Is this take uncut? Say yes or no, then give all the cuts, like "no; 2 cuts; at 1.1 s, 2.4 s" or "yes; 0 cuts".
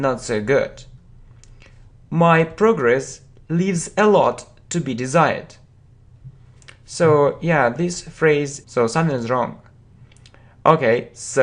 yes; 0 cuts